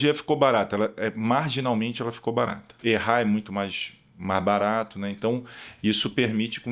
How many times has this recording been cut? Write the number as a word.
one